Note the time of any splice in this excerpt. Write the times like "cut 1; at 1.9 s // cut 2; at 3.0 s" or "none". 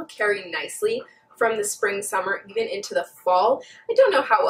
none